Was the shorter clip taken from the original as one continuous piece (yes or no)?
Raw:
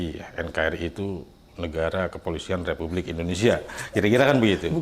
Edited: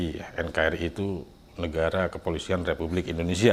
yes